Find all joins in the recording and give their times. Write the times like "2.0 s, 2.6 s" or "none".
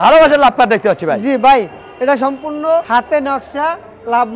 2.9 s